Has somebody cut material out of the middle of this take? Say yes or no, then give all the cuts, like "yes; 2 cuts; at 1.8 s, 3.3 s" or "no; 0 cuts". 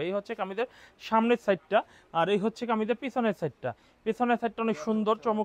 no; 0 cuts